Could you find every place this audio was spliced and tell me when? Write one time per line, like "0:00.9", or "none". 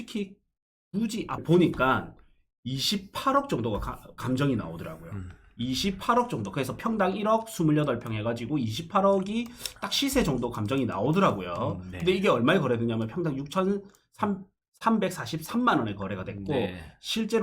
0:01.4